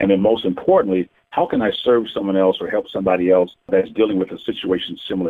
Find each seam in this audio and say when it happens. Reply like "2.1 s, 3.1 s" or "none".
3.6 s

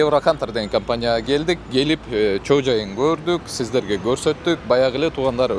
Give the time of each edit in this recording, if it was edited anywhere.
none

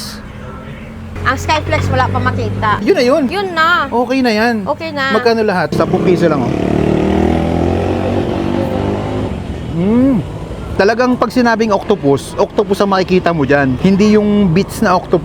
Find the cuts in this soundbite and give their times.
1.1 s, 5.7 s, 10.7 s

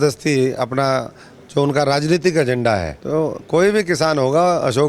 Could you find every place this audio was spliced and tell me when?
3.0 s

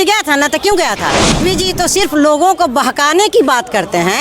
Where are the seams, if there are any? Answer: 1.4 s

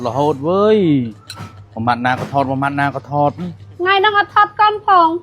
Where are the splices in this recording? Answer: none

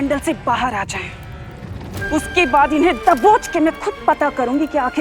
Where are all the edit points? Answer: none

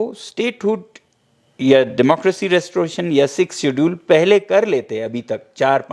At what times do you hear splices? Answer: none

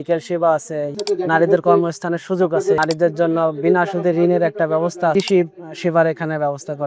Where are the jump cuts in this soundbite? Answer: 0.9 s, 2.8 s, 5.1 s

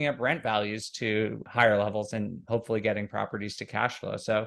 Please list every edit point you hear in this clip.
1.5 s

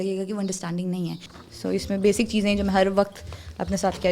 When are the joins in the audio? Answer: 1.3 s

